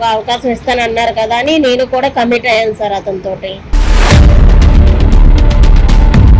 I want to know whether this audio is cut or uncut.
uncut